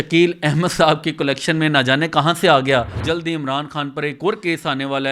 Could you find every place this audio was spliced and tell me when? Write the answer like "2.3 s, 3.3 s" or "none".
3.0 s